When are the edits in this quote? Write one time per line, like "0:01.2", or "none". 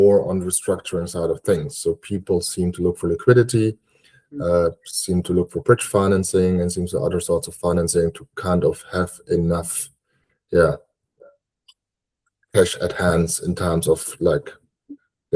none